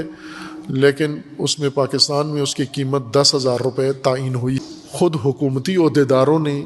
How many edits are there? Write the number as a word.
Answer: one